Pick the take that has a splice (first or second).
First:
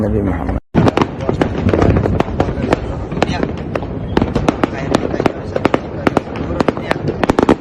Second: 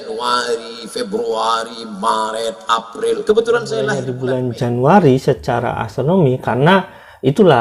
second